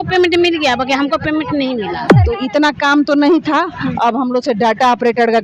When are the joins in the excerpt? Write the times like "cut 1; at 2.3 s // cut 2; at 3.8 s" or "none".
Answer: cut 1; at 2.1 s